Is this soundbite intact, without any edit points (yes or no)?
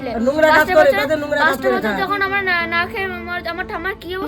yes